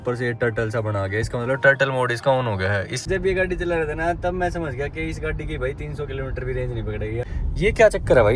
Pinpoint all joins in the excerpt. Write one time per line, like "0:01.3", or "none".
0:03.0
0:07.2